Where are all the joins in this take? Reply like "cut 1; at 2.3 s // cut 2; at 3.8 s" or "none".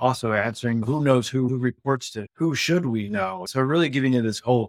cut 1; at 3.4 s